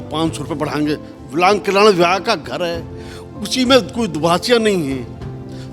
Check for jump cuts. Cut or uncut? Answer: cut